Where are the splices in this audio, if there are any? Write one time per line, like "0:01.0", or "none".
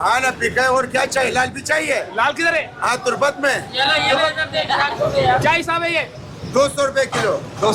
none